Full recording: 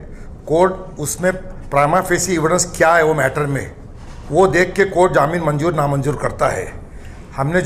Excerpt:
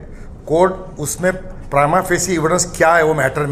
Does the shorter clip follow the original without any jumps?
yes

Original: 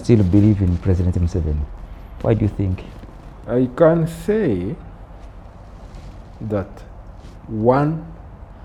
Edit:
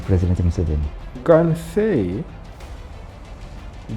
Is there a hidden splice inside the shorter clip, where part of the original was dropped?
yes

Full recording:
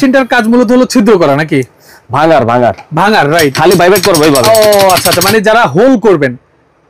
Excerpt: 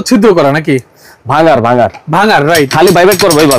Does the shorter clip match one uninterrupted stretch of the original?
yes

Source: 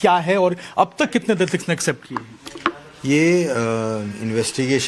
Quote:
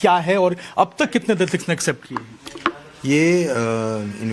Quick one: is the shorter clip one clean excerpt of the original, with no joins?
yes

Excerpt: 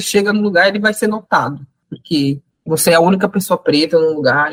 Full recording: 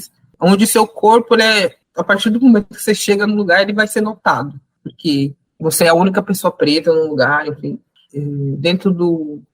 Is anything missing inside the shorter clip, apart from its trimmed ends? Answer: no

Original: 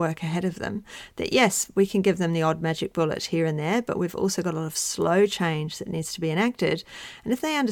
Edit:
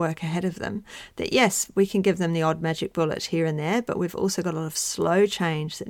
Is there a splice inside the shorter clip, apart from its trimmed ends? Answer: no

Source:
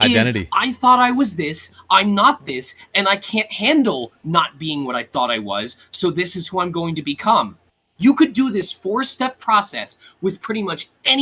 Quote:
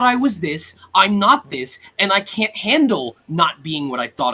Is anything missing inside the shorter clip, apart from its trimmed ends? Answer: no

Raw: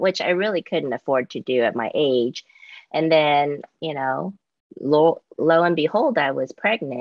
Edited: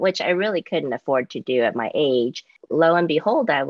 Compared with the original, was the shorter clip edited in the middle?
yes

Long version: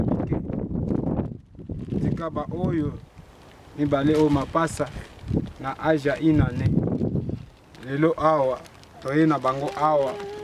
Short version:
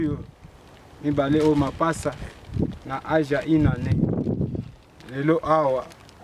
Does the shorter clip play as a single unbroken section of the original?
yes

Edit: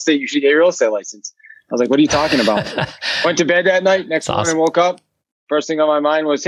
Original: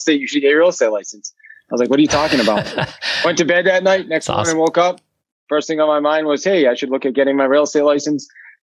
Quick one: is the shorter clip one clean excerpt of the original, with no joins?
yes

